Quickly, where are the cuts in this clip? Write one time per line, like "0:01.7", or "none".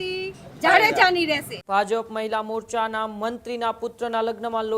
0:01.5

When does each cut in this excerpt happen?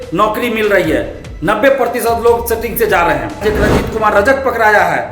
0:03.4

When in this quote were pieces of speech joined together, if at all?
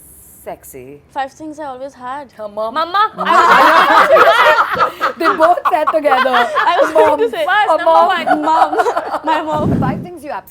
0:01.0
0:09.7

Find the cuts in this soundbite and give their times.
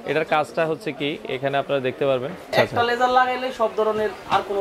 0:02.5

